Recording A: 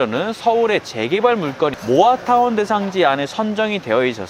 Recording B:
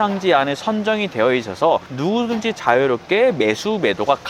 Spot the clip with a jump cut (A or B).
A